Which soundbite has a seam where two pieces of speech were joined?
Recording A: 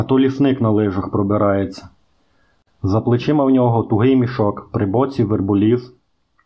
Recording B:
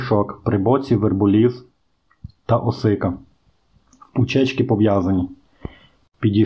A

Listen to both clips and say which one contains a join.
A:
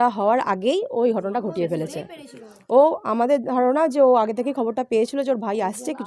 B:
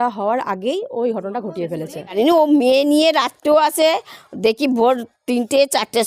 B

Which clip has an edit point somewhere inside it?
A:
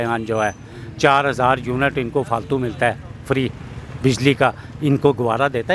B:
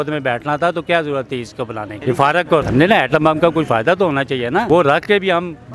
B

